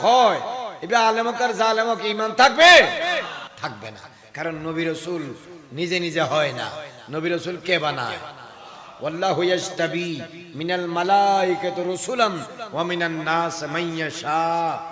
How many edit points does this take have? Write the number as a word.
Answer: one